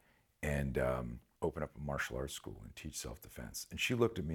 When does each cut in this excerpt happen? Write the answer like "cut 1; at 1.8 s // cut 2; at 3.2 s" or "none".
cut 1; at 1.2 s